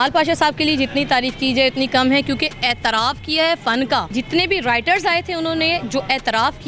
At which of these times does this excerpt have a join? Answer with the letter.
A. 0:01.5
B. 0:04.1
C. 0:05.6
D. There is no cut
B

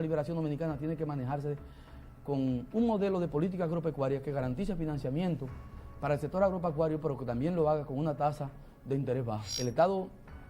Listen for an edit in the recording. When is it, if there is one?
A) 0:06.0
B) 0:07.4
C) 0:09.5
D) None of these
C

